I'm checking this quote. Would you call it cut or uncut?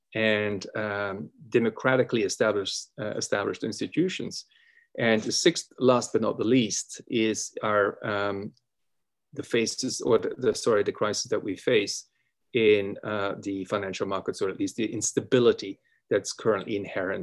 uncut